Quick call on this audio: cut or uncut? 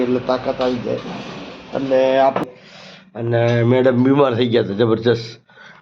cut